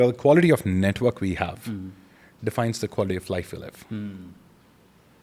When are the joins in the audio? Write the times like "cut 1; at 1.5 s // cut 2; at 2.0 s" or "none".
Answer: none